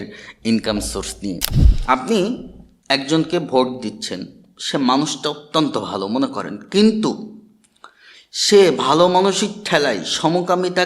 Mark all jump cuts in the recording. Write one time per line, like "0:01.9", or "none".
0:01.5